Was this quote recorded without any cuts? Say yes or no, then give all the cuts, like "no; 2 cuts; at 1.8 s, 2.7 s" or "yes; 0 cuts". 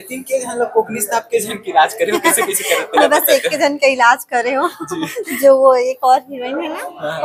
yes; 0 cuts